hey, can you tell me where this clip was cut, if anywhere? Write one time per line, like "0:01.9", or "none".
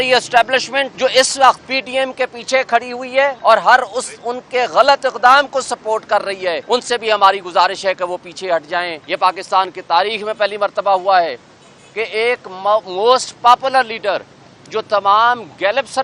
0:00.9
0:01.7
0:03.4
0:06.6
0:09.0